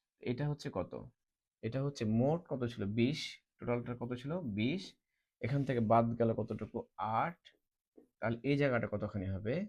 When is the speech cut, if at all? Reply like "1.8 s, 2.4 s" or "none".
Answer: none